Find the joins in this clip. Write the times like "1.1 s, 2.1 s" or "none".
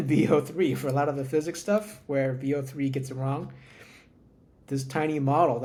none